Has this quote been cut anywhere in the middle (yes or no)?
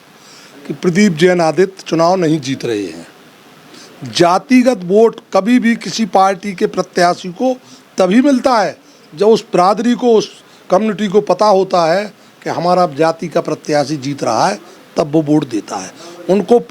no